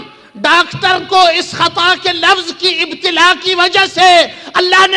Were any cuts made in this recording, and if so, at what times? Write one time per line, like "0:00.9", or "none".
none